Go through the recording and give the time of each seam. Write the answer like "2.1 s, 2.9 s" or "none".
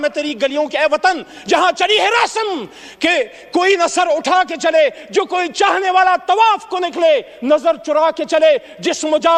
none